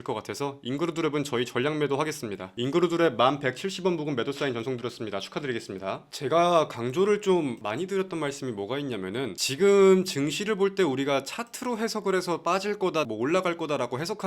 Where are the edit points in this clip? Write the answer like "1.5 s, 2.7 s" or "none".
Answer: 6.1 s